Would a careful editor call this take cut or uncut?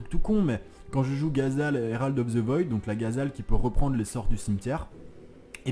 uncut